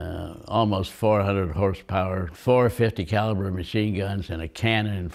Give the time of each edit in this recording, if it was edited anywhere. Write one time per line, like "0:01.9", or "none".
0:02.3